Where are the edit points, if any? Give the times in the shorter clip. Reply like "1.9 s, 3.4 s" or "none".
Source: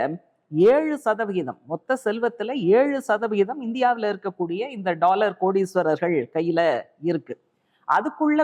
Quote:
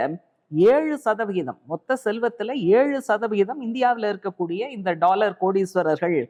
none